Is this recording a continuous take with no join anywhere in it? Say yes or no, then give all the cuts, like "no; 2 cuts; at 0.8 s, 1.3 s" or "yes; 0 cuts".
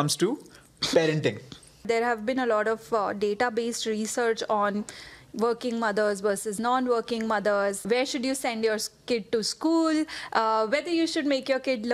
no; 2 cuts; at 1.8 s, 7.8 s